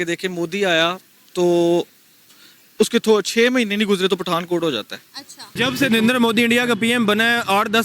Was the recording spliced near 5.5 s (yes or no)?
yes